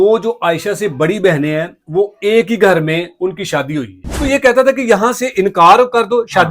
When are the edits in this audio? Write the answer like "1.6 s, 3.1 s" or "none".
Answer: 4.2 s